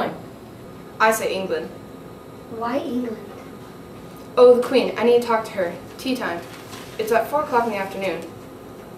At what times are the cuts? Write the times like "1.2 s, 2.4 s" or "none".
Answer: none